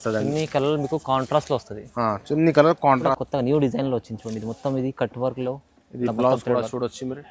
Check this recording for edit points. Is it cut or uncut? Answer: cut